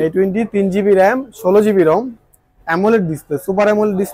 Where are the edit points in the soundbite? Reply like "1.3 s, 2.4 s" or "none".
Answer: none

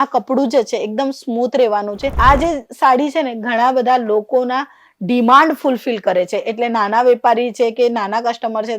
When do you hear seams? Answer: 2.1 s

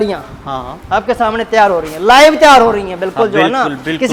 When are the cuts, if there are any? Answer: none

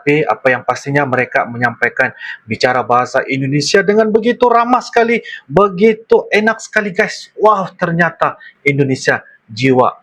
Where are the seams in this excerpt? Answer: none

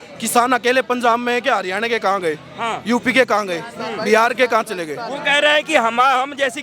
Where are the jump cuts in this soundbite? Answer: none

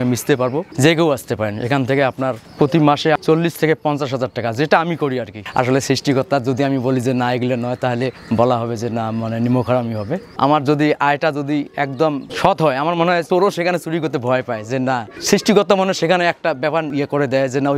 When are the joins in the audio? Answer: 5.4 s, 10.3 s, 12.3 s, 13.2 s, 15.1 s, 16.9 s

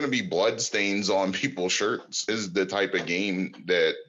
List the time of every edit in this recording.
2.3 s

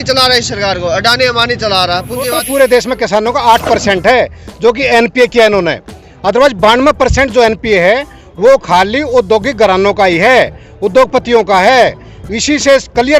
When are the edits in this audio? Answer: 2.4 s

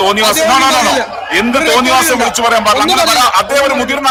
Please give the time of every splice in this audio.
none

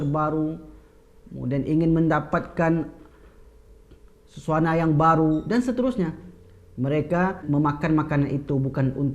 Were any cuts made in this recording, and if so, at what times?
7.4 s

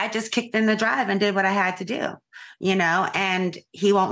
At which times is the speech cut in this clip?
2.3 s

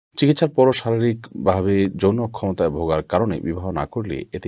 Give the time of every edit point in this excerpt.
none

